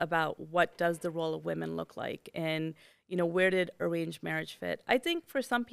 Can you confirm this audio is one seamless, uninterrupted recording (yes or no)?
yes